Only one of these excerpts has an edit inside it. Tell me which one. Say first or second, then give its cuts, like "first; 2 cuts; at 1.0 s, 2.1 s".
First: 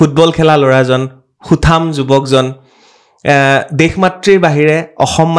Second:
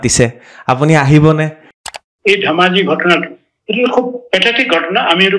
second; 1 cut; at 2.0 s